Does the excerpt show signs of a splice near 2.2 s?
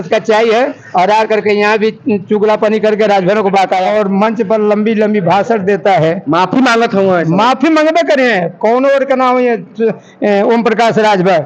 no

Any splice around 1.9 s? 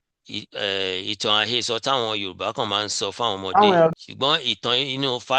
no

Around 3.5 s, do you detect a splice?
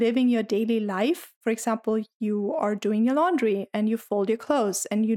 no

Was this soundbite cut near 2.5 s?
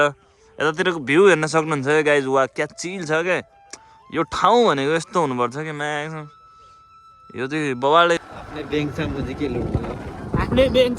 no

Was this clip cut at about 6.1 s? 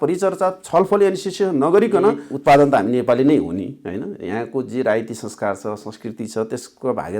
no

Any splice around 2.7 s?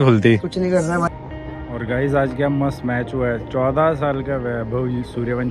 no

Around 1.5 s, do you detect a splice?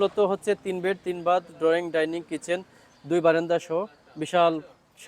no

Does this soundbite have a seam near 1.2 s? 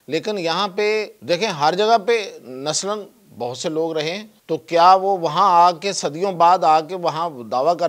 yes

